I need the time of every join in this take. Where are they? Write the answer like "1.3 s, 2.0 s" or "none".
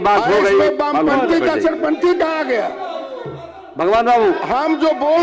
none